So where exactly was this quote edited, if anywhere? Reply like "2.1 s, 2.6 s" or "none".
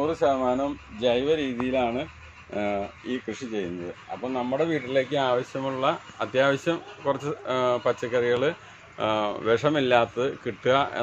none